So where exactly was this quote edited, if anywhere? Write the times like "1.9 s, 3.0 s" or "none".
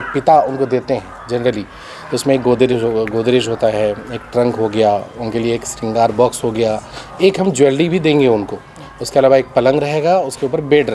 none